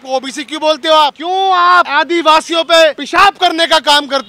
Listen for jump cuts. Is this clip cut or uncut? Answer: cut